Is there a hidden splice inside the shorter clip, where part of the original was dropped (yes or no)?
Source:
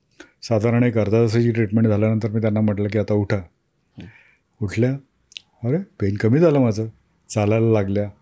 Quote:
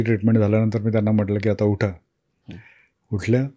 no